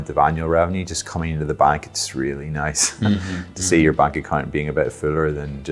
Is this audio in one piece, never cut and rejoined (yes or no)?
yes